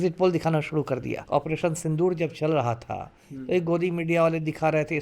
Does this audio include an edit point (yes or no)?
yes